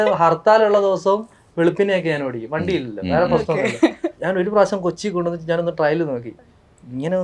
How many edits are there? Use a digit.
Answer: 1